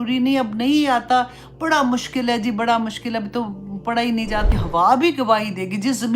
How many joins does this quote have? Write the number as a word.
one